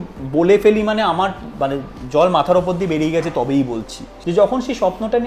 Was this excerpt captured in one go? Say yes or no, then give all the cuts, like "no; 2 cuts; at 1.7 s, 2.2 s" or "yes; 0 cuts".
no; 1 cut; at 4.1 s